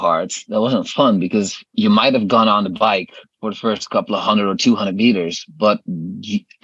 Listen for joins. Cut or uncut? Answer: cut